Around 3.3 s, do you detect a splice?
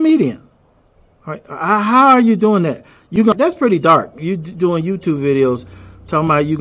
yes; 1 cut; at 3.3 s

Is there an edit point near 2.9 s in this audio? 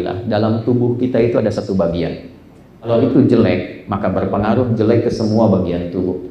yes; 1 cut; at 2.9 s

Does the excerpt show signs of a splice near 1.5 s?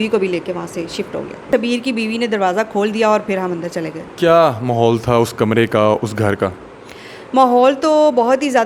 yes; 1 cut; at 1.5 s

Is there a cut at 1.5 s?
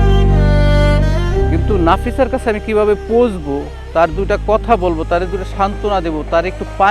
yes; 1 cut; at 1.5 s

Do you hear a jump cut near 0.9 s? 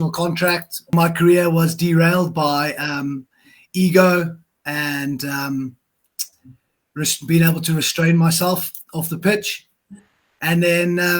yes; 1 cut; at 0.9 s

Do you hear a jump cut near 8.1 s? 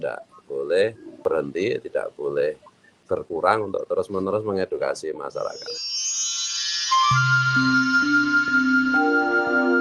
no; 1 cut; at 5.8 s

